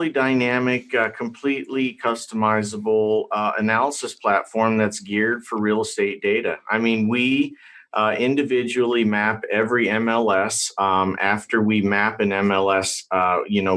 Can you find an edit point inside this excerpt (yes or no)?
no